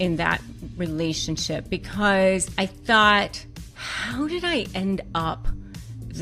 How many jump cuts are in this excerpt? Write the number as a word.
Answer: one